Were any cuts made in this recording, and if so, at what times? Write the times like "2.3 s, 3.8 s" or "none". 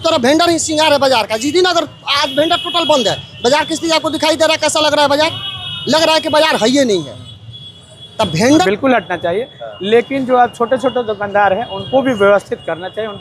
8.7 s